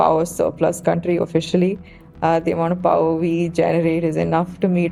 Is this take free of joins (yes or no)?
yes